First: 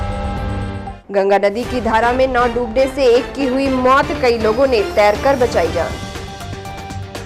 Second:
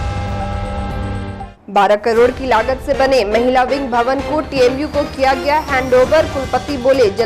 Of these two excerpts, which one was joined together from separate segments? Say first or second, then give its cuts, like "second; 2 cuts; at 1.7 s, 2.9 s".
second; 1 cut; at 1.5 s